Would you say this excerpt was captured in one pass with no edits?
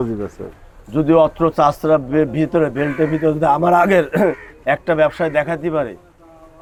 yes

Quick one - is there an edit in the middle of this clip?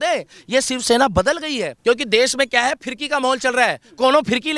yes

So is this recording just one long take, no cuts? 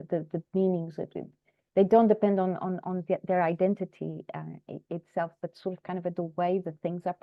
yes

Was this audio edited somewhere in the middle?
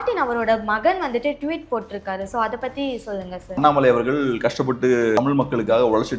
yes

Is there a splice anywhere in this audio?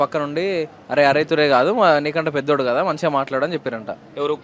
no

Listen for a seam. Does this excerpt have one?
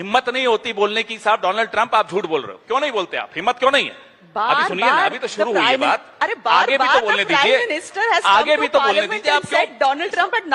no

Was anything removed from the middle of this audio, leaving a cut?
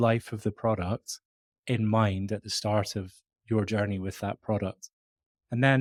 no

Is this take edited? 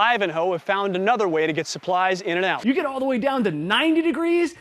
yes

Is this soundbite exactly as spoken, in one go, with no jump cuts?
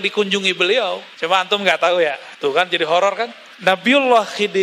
no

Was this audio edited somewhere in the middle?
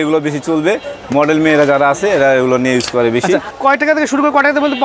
no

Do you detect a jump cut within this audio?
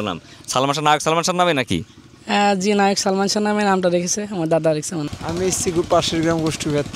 yes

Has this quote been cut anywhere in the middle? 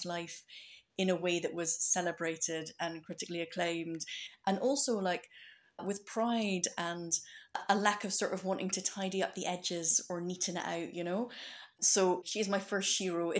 no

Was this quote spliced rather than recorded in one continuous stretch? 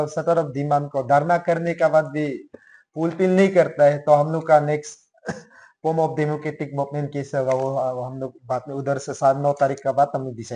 no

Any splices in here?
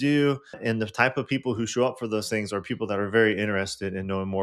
no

